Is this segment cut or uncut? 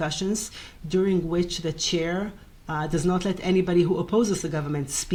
uncut